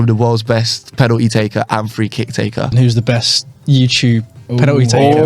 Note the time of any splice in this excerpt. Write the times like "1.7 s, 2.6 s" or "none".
2.7 s